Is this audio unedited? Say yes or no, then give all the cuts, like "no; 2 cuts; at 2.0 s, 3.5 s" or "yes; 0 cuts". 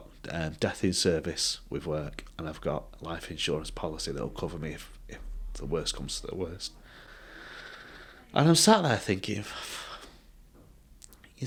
yes; 0 cuts